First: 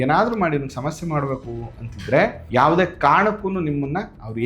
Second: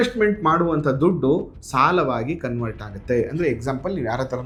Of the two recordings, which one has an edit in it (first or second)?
first